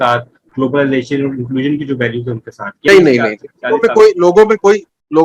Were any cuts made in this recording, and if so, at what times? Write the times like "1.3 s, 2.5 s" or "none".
2.9 s

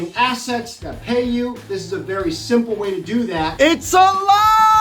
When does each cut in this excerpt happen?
3.5 s

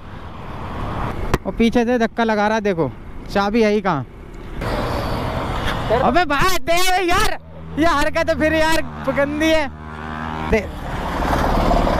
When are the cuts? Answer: 1.1 s, 4.6 s, 10.5 s

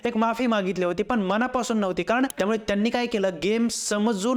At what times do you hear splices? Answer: 2.3 s

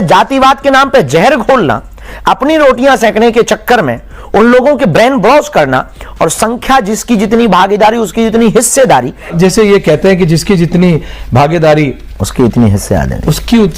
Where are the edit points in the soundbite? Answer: 9.3 s

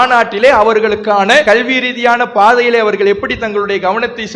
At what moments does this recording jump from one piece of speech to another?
1.4 s

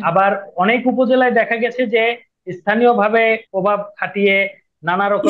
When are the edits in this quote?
3.4 s

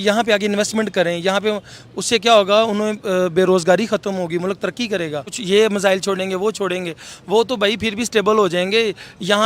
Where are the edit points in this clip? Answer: 5.3 s

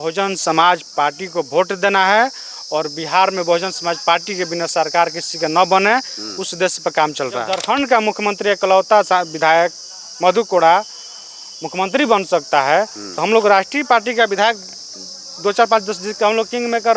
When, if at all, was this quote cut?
7.5 s

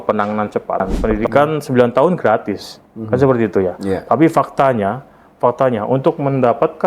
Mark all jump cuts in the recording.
0.9 s

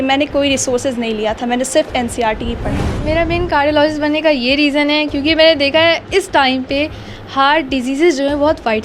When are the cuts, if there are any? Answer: 3.0 s

